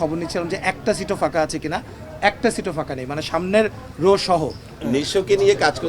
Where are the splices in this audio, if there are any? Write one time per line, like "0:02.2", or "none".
0:04.7

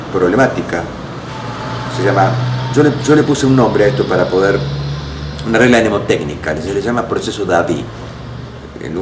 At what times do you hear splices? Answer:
0:03.9

